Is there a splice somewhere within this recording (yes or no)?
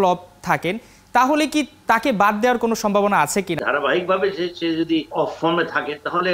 yes